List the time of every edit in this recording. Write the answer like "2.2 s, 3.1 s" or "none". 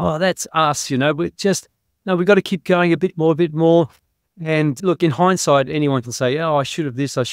4.8 s

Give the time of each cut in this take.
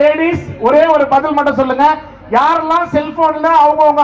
none

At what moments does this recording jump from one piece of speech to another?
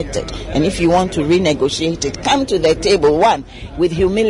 none

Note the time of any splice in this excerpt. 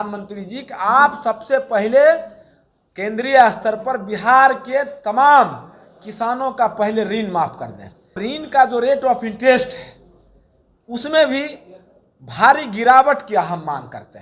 8.2 s

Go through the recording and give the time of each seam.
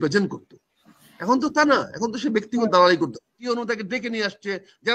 3.4 s

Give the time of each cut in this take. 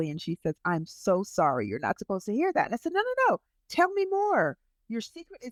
none

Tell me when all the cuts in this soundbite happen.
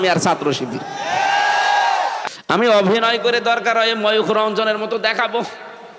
2.2 s

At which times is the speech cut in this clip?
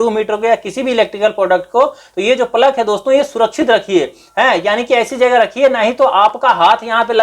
none

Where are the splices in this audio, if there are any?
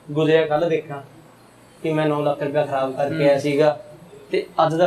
none

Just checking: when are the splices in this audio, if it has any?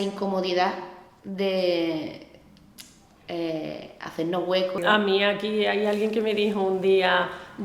4.8 s

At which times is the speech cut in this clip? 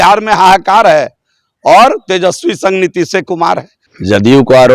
3.7 s

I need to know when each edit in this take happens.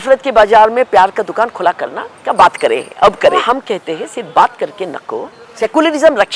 3.4 s, 5.4 s

